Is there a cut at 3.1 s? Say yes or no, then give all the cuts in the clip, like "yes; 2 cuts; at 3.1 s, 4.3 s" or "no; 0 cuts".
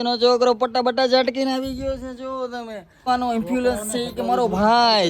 yes; 1 cut; at 3.1 s